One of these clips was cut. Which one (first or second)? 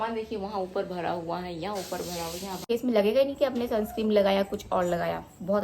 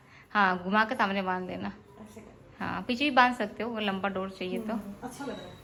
first